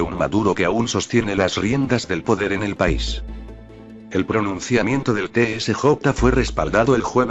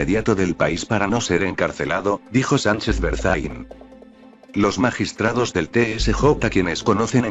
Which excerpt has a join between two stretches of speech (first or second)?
second